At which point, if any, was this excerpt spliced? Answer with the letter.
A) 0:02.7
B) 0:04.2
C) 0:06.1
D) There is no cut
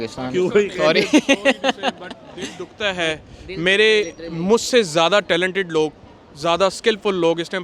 D